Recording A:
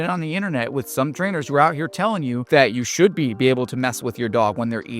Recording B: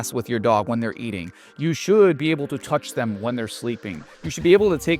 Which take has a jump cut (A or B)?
A